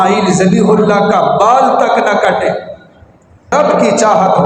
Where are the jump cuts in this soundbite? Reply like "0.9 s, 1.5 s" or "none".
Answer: 3.5 s